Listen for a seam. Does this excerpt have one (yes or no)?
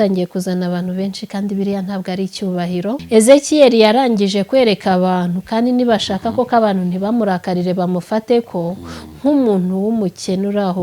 yes